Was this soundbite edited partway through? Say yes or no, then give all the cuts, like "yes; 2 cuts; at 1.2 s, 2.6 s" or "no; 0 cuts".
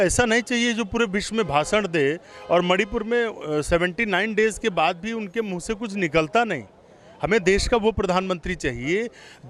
no; 0 cuts